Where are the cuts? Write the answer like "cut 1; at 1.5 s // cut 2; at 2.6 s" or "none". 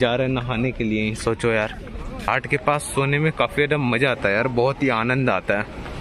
cut 1; at 2.3 s